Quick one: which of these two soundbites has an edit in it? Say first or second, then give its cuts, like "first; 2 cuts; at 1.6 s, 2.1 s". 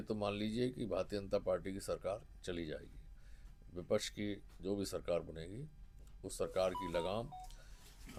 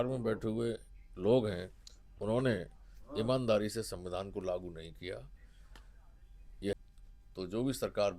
second; 1 cut; at 6.7 s